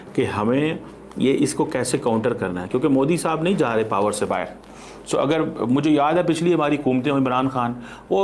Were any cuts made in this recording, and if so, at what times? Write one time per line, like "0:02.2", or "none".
none